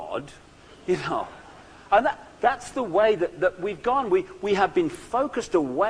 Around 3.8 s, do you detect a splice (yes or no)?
yes